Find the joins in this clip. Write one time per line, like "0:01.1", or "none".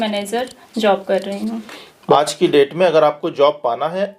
0:02.2